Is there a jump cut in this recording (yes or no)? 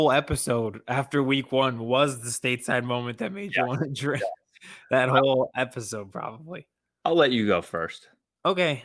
no